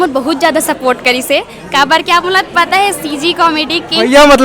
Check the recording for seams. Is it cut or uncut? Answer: uncut